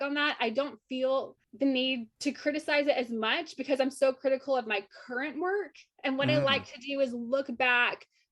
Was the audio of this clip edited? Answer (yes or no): yes